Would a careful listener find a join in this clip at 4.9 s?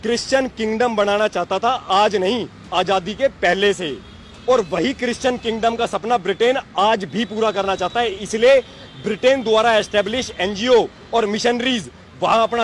no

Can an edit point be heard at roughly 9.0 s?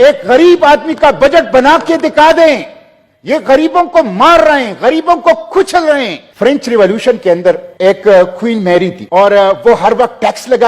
yes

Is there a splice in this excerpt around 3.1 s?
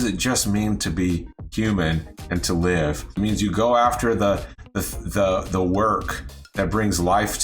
yes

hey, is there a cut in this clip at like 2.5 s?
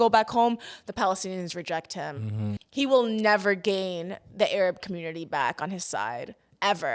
yes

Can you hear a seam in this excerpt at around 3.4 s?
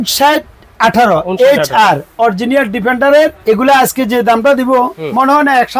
yes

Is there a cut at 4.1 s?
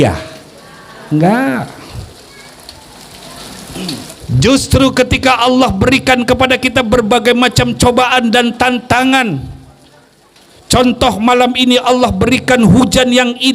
yes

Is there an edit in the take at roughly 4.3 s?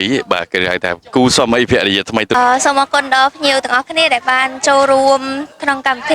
no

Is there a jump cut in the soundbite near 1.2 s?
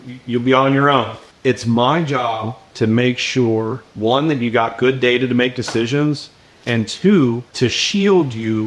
yes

